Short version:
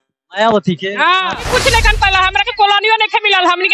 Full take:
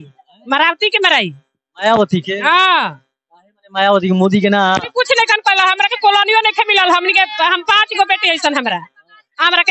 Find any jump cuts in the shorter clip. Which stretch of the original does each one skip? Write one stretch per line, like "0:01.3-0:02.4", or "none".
0:02.8-0:04.8